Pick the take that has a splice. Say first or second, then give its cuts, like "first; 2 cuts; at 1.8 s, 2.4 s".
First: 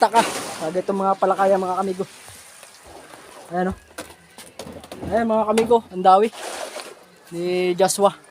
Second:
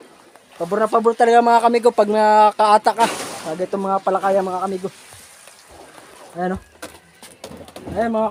first; 1 cut; at 7.2 s